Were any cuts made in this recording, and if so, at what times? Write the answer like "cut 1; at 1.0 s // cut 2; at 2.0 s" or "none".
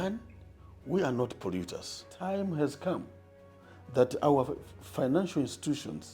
cut 1; at 2.1 s

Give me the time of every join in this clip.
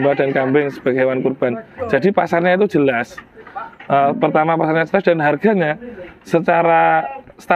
none

